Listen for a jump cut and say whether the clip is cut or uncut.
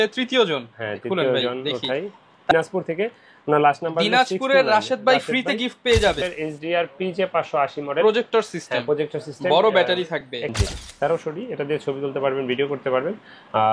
cut